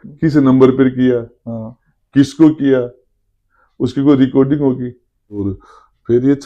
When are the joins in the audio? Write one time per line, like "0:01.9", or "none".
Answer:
0:05.5